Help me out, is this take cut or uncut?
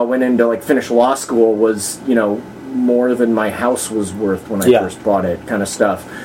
uncut